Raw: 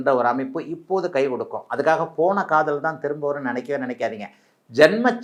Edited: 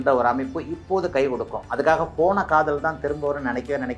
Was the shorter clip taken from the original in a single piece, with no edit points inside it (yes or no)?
yes